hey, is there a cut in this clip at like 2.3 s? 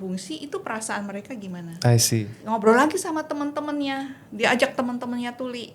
yes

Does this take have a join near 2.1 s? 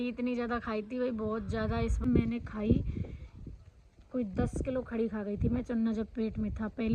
yes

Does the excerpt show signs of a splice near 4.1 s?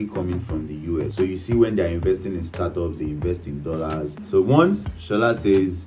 yes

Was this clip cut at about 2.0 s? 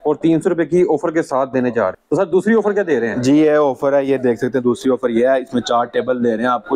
no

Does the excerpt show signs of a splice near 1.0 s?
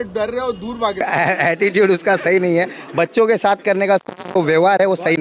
yes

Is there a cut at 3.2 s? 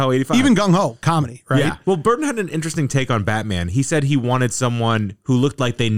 no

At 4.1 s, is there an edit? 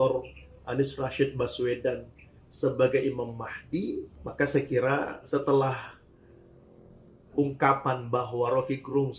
yes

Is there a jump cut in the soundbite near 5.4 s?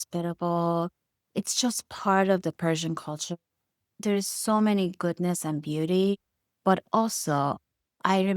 no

